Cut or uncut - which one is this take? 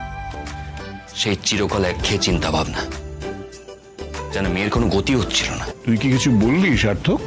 cut